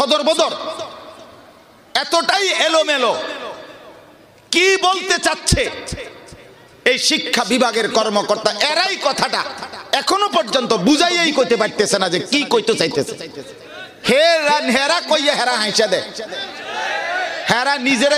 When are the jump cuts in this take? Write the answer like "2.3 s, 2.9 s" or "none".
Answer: none